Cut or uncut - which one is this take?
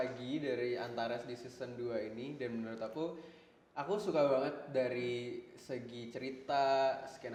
uncut